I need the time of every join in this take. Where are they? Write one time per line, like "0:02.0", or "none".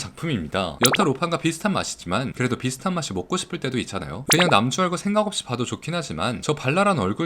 0:00.7
0:04.2

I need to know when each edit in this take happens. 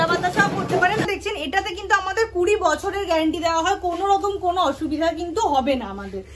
0:01.1

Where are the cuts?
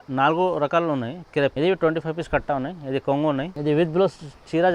0:01.5
0:03.5

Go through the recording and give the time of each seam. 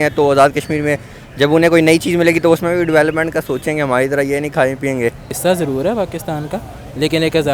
0:05.4

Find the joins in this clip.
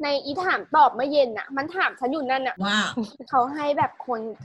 none

